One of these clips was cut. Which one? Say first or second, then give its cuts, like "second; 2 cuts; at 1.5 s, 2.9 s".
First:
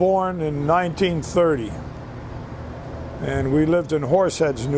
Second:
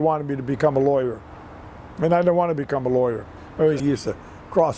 second; 1 cut; at 3.8 s